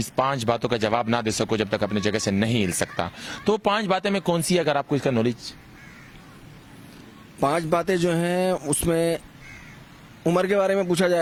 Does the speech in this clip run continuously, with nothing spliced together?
yes; 0 cuts

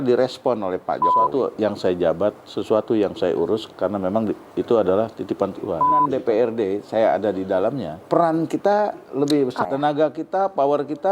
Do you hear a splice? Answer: yes; 4 cuts; at 1.3 s, 6.1 s, 7.9 s, 9.6 s

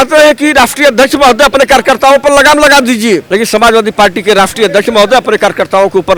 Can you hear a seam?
no; 0 cuts

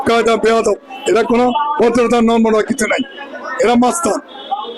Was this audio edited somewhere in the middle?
no; 0 cuts

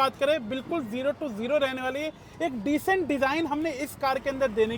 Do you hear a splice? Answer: no; 0 cuts

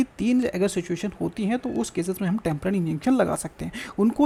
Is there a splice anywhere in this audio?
no; 0 cuts

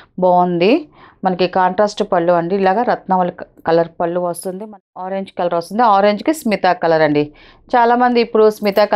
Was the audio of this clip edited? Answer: yes; 1 cut; at 4.7 s

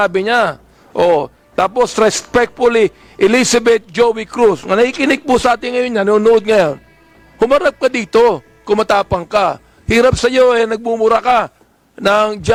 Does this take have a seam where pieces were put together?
no; 0 cuts

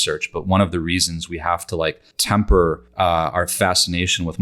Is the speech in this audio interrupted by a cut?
yes; 2 cuts; at 2.1 s, 2.8 s

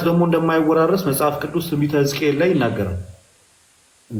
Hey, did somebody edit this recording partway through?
no; 0 cuts

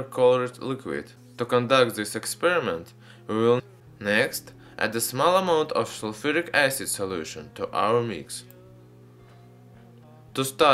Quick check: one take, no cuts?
yes; 0 cuts

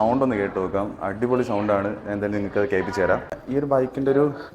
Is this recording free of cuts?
no; 1 cut; at 3.4 s

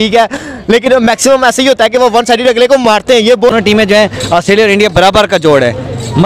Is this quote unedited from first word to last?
no; 1 cut; at 3.5 s

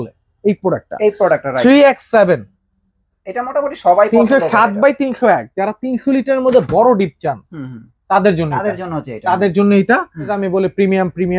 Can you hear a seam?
yes; 1 cut; at 10.4 s

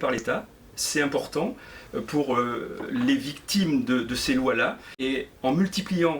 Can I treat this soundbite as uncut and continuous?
no; 1 cut; at 4.9 s

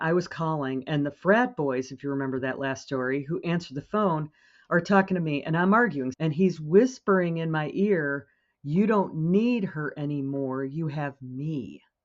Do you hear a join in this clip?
yes; 1 cut; at 6.1 s

